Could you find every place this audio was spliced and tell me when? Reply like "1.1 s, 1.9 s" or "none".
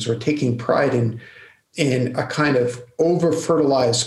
none

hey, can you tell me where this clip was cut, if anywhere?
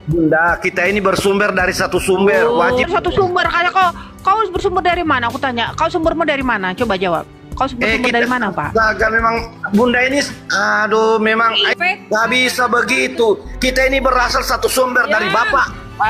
2.8 s, 11.7 s

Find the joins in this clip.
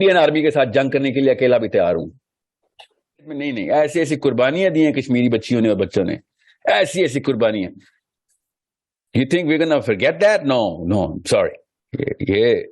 3.4 s

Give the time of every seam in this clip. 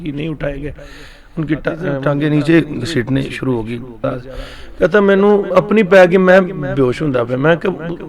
4.0 s

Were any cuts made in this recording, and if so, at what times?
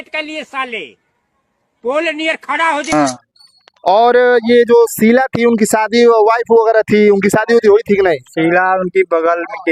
2.9 s

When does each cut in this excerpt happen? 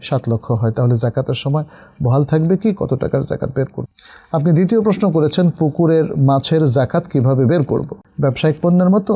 3.8 s, 8.0 s

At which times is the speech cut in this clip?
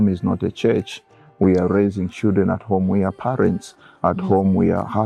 none

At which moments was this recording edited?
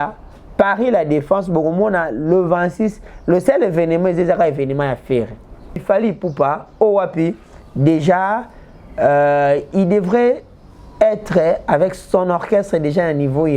5.8 s

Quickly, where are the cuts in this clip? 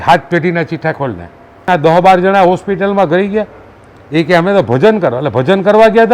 1.6 s

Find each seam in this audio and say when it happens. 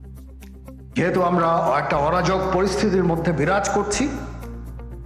0.9 s

